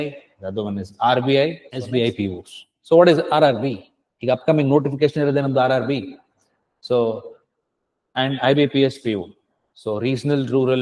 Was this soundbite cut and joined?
yes; 1 cut; at 1.7 s

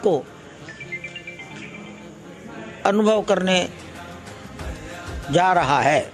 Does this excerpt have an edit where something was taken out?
no; 0 cuts

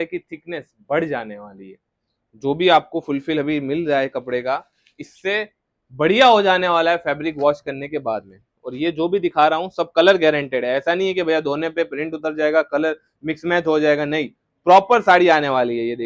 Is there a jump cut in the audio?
no; 0 cuts

